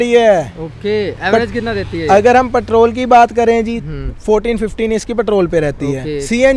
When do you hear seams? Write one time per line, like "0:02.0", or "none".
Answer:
none